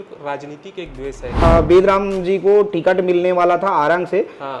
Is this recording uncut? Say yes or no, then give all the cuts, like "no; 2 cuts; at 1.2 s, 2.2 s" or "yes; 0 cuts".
no; 1 cut; at 1.4 s